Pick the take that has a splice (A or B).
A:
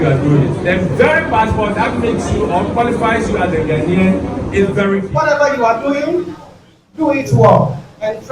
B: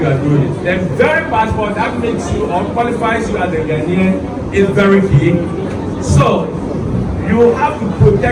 A